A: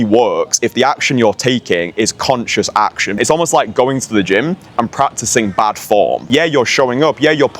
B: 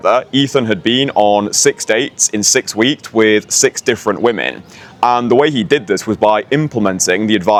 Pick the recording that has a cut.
A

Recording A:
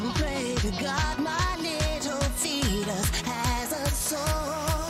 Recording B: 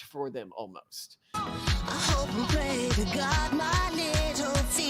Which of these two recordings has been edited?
B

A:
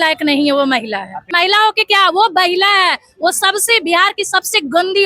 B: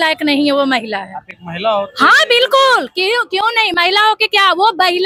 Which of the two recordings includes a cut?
A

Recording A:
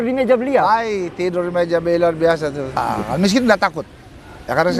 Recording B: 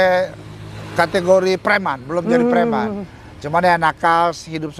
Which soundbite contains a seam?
A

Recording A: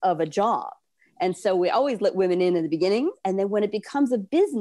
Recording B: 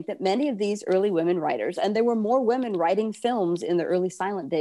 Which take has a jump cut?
A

